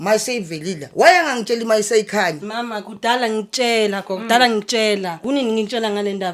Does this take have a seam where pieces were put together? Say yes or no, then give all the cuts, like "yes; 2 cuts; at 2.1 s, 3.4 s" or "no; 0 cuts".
yes; 1 cut; at 5.2 s